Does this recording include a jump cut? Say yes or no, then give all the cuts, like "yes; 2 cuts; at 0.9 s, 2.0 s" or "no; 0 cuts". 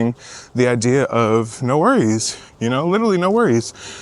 no; 0 cuts